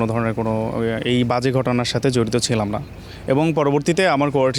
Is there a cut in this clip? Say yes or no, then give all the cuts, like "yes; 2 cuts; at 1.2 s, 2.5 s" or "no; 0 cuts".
no; 0 cuts